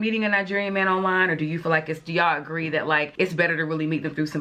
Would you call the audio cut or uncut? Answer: uncut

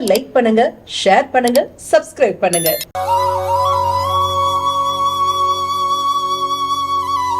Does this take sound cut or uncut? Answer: uncut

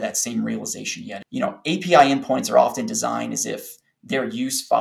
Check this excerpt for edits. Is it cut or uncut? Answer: cut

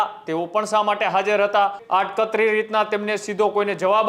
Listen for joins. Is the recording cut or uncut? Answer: cut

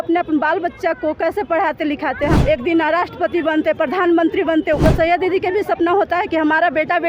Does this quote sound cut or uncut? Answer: cut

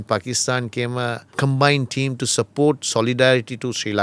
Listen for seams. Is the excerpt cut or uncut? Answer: cut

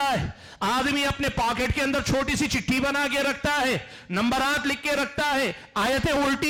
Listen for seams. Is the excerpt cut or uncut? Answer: uncut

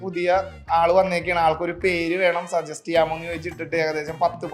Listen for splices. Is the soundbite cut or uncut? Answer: uncut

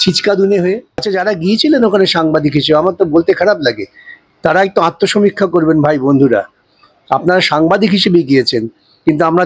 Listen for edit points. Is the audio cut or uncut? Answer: cut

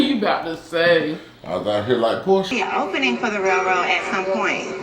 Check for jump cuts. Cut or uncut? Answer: cut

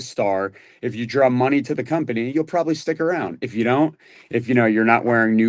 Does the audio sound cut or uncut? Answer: uncut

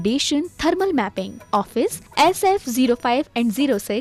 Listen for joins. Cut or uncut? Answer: uncut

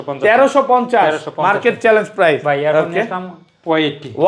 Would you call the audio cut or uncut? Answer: uncut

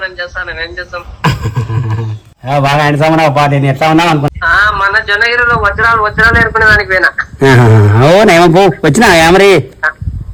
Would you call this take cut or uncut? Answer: uncut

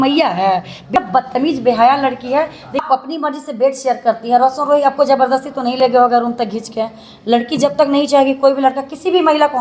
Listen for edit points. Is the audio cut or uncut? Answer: cut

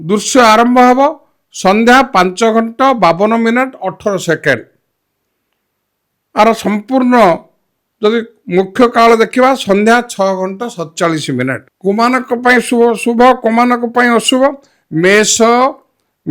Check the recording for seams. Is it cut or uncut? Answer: cut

